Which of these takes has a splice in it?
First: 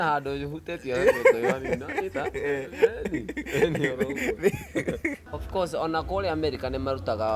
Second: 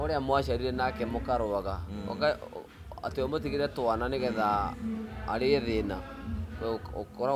first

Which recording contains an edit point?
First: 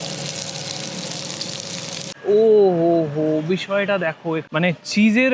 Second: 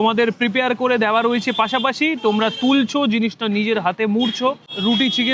first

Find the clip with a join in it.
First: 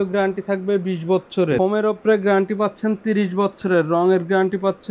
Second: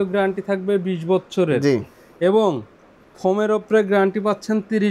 first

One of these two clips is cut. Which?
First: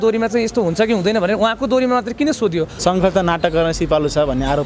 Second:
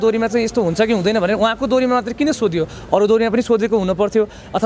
first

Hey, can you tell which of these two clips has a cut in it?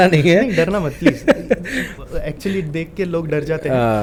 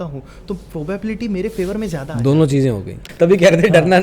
second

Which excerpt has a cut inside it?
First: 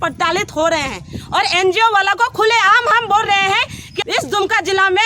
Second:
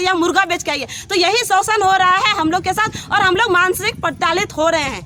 first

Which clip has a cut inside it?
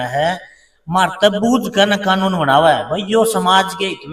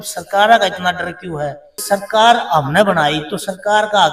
second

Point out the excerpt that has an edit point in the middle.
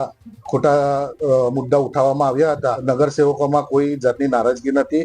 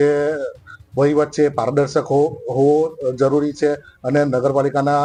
first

